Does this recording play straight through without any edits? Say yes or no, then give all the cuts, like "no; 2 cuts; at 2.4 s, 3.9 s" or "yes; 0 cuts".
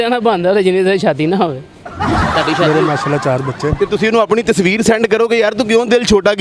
no; 1 cut; at 2.3 s